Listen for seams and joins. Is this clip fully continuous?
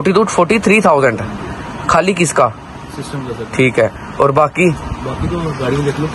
yes; 0 cuts

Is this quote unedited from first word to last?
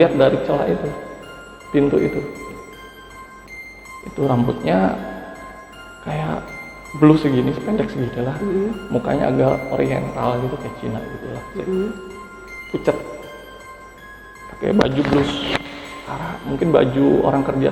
yes; 0 cuts

